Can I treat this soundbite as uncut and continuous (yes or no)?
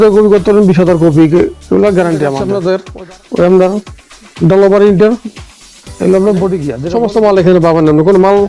no